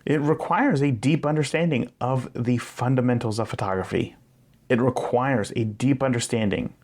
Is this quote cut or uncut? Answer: uncut